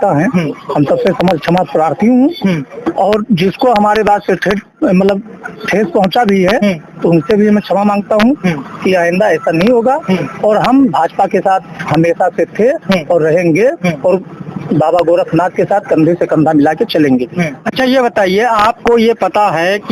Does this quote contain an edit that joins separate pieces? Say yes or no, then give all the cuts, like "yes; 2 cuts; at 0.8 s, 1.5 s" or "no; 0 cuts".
no; 0 cuts